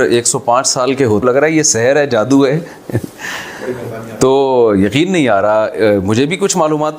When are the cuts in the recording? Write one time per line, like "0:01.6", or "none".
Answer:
0:01.2